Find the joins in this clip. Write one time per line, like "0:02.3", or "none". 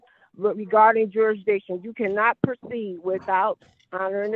none